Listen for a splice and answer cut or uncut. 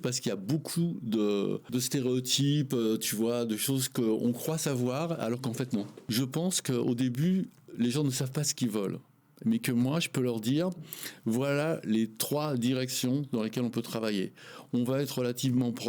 cut